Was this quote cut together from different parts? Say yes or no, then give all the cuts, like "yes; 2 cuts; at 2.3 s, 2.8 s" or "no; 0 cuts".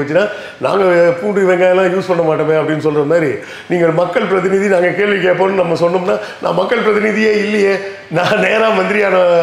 no; 0 cuts